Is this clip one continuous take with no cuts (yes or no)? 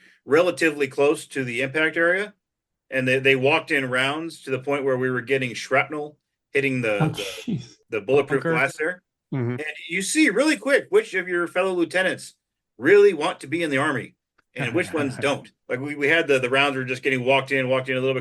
no